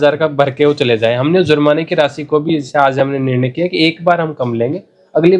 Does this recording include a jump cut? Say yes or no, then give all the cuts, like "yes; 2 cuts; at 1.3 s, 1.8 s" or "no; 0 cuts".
no; 0 cuts